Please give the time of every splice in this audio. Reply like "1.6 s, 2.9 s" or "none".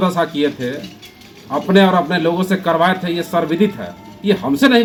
none